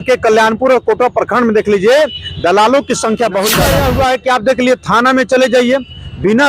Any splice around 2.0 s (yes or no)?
no